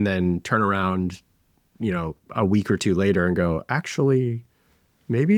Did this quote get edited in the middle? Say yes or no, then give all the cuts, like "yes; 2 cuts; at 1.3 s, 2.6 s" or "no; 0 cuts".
no; 0 cuts